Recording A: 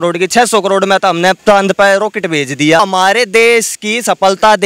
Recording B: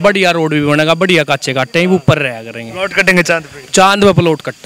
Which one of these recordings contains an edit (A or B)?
A